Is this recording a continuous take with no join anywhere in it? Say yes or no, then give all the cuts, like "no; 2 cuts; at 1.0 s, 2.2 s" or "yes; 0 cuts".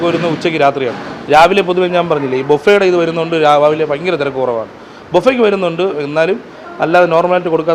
yes; 0 cuts